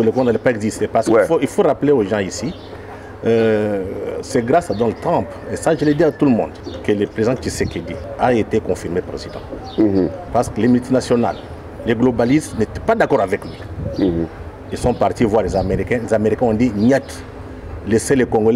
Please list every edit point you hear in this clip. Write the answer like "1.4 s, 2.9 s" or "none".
6.7 s, 8.0 s, 10.2 s

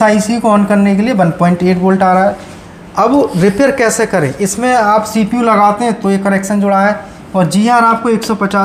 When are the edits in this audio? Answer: none

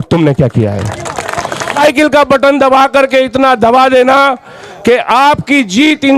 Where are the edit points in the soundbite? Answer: 1.8 s

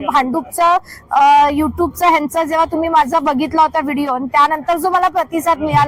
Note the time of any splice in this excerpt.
none

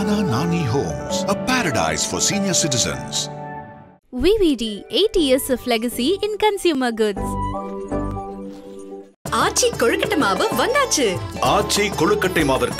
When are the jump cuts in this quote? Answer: none

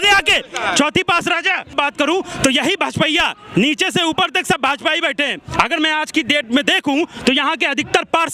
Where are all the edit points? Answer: 1.7 s

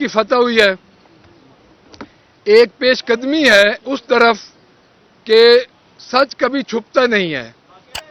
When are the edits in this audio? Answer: none

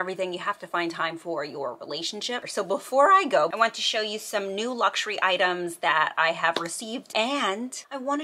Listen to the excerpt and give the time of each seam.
2.5 s, 3.5 s, 7.3 s

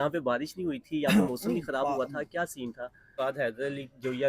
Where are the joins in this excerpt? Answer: 3.0 s

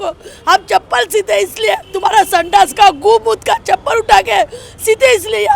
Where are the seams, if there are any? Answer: 1.9 s

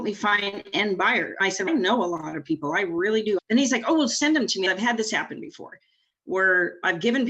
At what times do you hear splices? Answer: 1.5 s, 3.4 s, 4.7 s

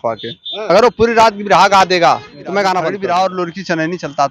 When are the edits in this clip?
2.9 s

